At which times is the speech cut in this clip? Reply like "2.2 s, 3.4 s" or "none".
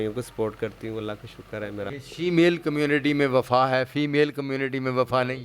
1.9 s

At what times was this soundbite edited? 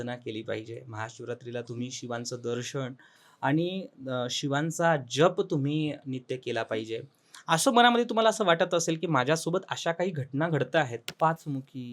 11.0 s

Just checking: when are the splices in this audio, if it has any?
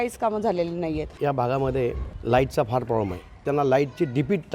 1.2 s, 2.1 s, 3.4 s

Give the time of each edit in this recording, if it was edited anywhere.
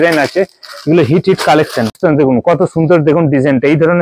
2.0 s

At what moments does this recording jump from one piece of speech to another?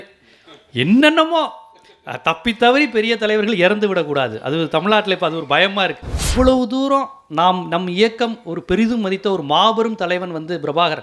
6.2 s

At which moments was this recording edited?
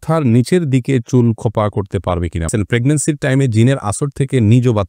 2.5 s

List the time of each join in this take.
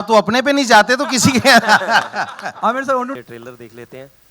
3.2 s

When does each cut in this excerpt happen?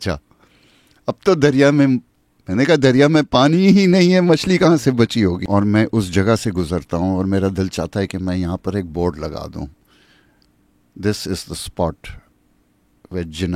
5.4 s

